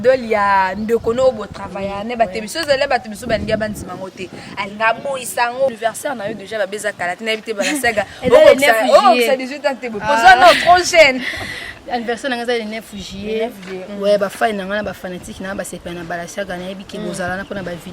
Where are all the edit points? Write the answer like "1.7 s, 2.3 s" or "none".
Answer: 5.7 s